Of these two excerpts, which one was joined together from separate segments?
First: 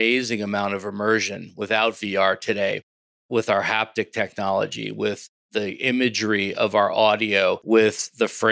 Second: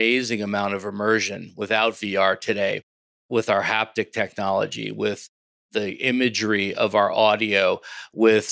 first; 2 cuts; at 5.3 s, 7.6 s

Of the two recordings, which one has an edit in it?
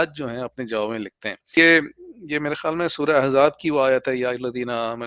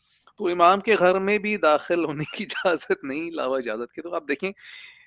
first; 1 cut; at 1.5 s

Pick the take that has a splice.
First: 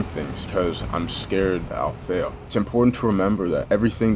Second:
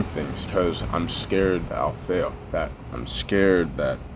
first; 1 cut; at 2.4 s

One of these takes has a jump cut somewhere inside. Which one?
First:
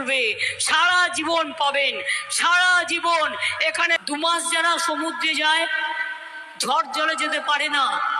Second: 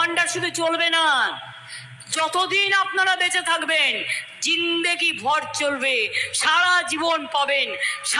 first; 1 cut; at 4.0 s

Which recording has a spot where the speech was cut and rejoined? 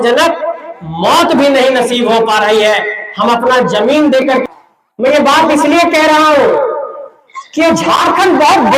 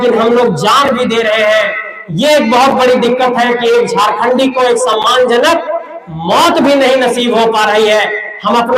first; 1 cut; at 4.4 s

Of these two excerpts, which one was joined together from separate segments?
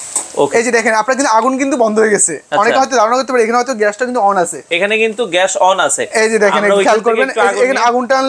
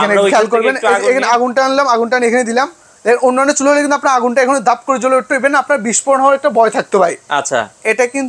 first; 1 cut; at 4.6 s

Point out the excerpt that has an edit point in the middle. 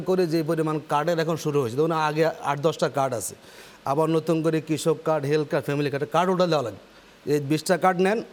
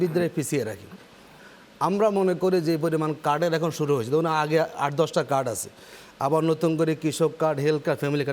second; 1 cut; at 1.3 s

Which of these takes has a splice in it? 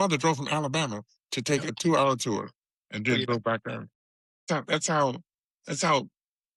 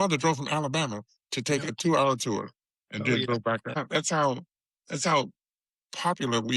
second; 1 cut; at 3.8 s

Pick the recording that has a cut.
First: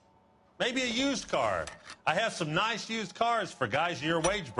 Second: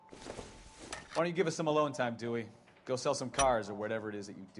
second; 1 cut; at 1.1 s

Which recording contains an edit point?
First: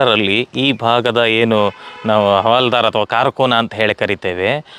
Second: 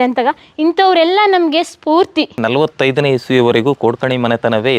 second; 1 cut; at 2.4 s

